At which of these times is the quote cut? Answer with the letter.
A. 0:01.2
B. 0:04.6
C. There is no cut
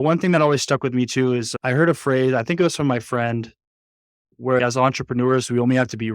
B